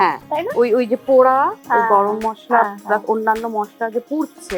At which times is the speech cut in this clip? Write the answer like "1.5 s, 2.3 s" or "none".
none